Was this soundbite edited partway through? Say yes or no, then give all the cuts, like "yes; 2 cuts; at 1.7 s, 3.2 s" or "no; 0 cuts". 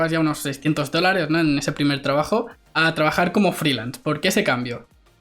no; 0 cuts